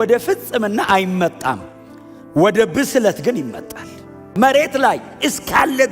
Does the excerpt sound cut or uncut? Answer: cut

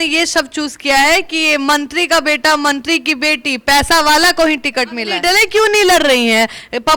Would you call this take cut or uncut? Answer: cut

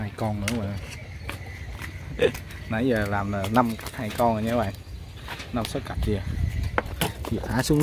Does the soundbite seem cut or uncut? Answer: uncut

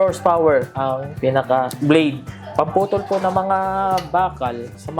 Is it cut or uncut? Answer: cut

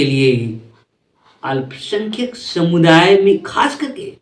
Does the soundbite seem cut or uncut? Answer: uncut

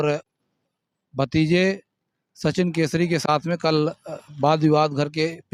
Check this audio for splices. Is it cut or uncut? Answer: uncut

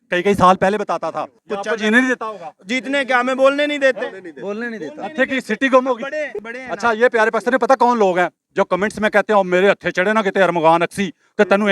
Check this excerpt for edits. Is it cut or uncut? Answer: cut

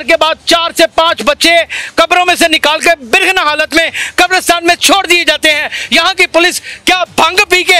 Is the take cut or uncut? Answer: uncut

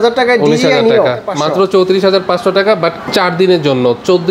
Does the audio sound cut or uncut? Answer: cut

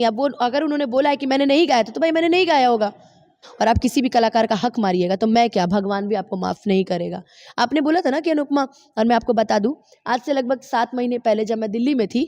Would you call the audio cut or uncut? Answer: cut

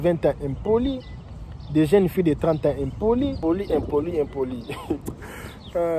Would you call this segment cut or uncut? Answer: uncut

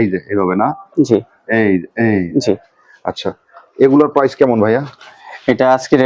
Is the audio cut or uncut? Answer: uncut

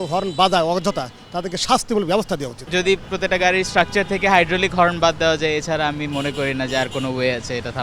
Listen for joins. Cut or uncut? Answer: uncut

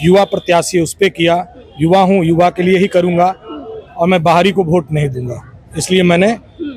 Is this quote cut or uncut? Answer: uncut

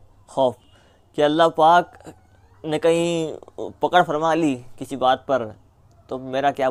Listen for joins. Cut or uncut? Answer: uncut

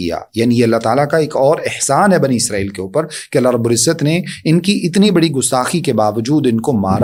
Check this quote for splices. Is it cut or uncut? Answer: uncut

